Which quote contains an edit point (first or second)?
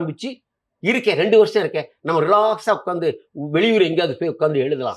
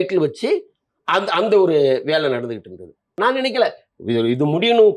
second